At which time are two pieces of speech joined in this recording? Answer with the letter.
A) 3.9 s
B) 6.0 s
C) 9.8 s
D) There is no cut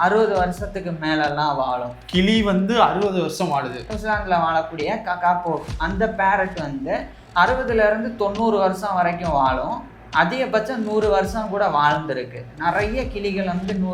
A